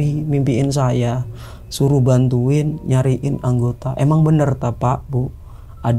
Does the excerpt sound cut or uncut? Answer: uncut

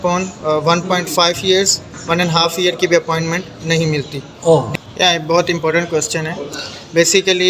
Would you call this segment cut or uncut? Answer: cut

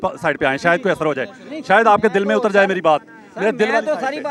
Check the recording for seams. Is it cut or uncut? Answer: uncut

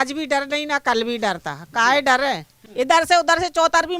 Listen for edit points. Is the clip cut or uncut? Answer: cut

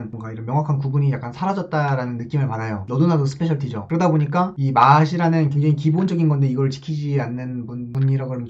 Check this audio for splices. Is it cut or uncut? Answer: uncut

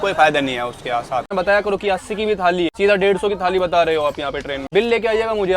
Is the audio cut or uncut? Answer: cut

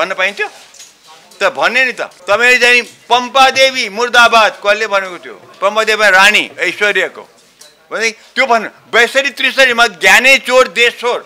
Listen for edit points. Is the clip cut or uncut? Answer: cut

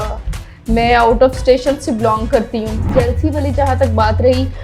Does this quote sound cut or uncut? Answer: cut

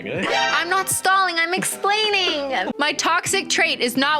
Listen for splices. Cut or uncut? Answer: cut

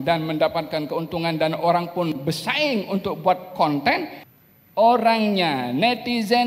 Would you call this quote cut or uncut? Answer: cut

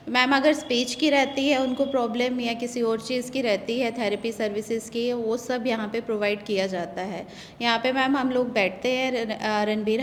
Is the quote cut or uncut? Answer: uncut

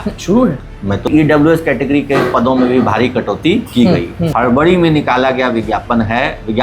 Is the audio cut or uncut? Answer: cut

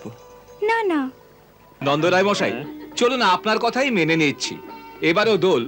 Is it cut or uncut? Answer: cut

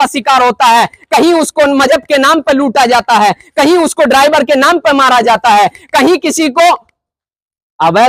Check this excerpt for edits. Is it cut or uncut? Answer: uncut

